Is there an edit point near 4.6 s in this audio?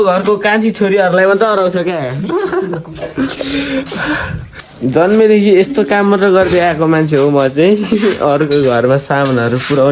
yes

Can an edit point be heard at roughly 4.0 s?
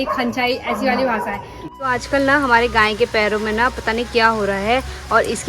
no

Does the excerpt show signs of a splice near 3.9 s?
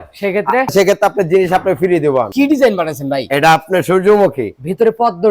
no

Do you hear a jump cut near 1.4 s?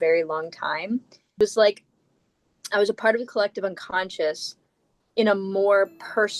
yes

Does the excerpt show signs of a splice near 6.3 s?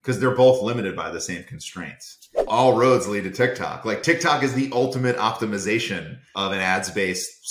yes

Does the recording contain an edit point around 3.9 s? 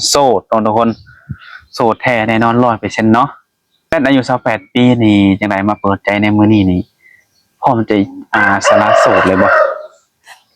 yes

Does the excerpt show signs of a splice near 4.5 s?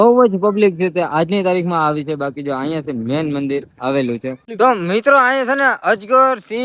yes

